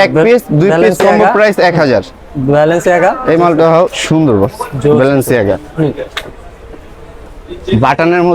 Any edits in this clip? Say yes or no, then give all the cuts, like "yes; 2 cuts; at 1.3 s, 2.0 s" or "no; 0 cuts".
no; 0 cuts